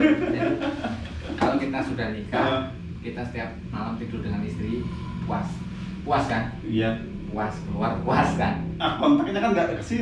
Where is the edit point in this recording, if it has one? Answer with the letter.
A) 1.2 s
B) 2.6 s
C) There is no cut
C